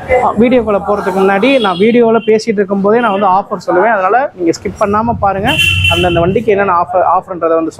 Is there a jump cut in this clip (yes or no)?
no